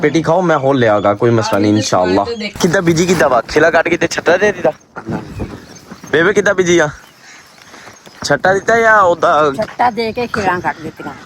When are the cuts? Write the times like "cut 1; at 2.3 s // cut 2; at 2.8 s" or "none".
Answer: cut 1; at 2.6 s